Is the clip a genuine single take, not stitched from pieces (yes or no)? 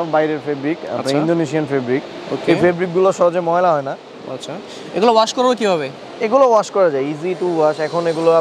yes